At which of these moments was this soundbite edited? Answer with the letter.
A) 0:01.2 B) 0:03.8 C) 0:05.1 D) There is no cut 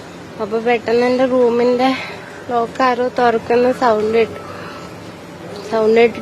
B